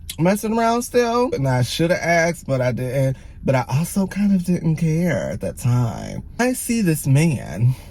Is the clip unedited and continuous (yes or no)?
no